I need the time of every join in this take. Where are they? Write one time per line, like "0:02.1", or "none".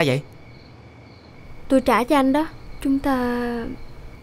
0:02.6